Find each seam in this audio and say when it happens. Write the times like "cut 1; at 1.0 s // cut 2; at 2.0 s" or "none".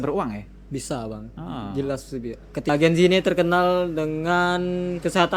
cut 1; at 2.7 s